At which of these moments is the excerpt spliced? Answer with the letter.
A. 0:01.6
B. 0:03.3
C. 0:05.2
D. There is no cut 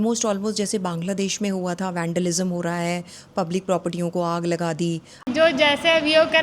C